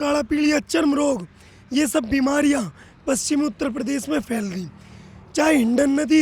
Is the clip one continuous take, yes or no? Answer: yes